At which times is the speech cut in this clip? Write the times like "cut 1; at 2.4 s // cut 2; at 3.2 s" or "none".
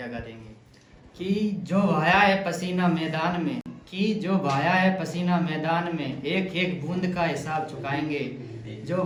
none

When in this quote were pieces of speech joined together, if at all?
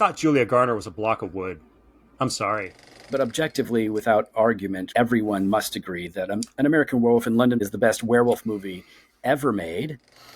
cut 1; at 3.1 s // cut 2; at 4.9 s // cut 3; at 7.6 s

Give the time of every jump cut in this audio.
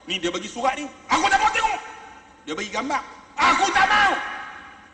none

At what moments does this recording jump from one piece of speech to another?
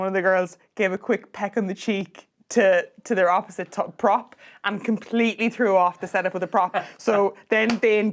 none

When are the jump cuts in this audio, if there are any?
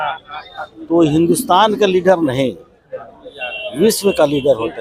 none

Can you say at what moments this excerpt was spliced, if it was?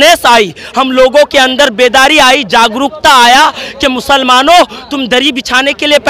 cut 1; at 3.6 s

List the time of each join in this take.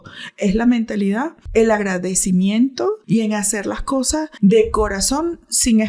cut 1; at 1.4 s // cut 2; at 3.0 s // cut 3; at 4.3 s

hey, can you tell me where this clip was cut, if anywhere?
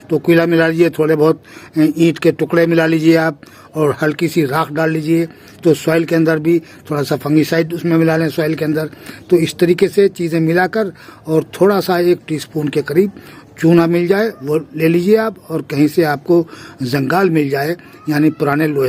none

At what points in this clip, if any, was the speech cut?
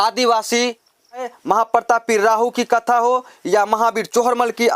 cut 1; at 1.3 s

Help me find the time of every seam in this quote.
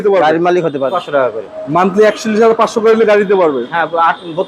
cut 1; at 0.9 s

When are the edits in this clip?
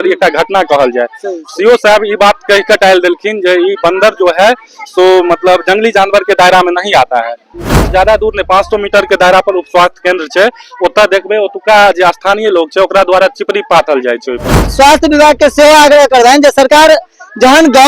cut 1; at 7.8 s // cut 2; at 14.7 s

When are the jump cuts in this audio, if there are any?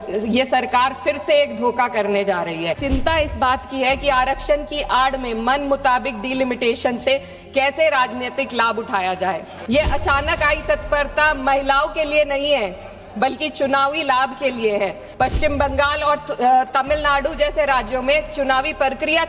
cut 1; at 2.8 s // cut 2; at 9.5 s // cut 3; at 15.0 s

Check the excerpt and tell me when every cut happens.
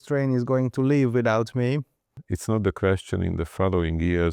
cut 1; at 2.2 s

